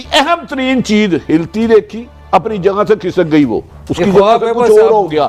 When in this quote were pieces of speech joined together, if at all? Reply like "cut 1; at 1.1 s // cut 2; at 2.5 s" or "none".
none